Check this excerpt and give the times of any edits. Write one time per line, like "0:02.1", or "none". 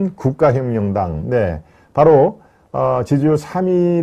none